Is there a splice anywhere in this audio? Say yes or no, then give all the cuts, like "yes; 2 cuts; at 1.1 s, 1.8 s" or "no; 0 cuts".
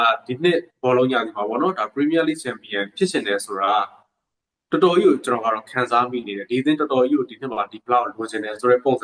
no; 0 cuts